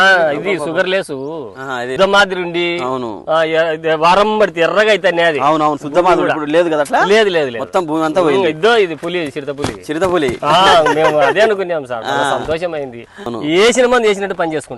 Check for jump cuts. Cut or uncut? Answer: cut